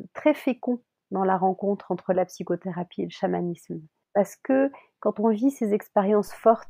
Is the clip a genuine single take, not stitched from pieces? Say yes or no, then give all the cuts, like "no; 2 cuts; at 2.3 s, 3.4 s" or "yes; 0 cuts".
yes; 0 cuts